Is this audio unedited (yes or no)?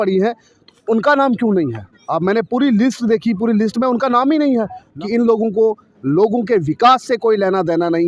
no